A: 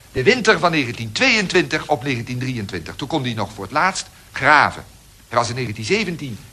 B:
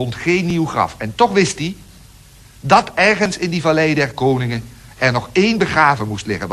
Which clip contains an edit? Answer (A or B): B